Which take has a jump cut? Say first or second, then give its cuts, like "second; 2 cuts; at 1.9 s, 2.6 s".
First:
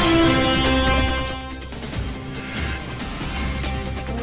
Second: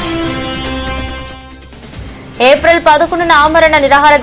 second; 2 cuts; at 0.9 s, 2.3 s